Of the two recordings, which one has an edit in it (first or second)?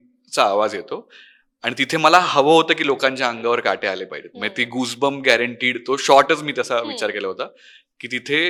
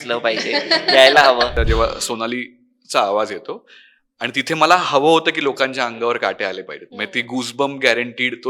second